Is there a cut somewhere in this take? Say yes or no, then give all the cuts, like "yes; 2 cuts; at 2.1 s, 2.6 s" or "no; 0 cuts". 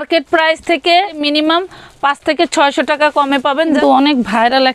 yes; 2 cuts; at 1.2 s, 3.8 s